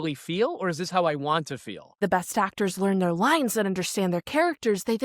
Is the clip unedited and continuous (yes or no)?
no